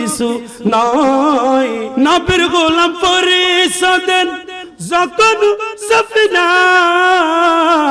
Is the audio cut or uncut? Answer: cut